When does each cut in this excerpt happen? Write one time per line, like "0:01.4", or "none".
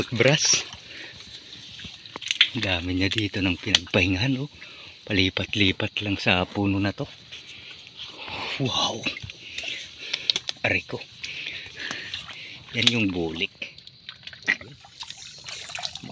0:13.5
0:15.1